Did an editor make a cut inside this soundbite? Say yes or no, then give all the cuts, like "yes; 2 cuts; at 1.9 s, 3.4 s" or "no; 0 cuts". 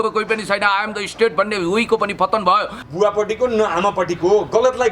yes; 1 cut; at 2.8 s